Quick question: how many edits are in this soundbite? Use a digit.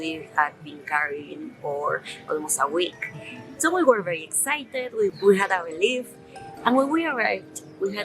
1